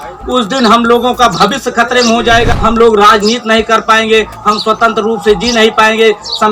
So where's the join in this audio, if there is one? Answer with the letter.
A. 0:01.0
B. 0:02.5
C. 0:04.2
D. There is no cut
B